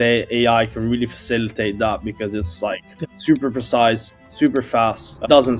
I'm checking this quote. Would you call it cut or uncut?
uncut